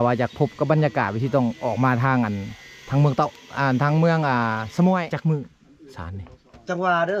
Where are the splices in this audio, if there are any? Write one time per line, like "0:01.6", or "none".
0:05.2